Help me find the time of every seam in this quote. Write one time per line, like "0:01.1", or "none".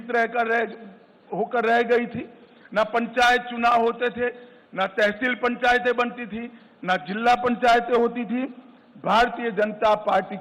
none